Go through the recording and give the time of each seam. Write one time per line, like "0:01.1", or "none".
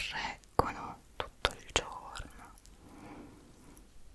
none